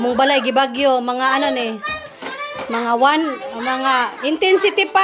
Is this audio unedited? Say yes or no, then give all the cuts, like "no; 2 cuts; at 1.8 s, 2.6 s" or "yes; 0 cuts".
yes; 0 cuts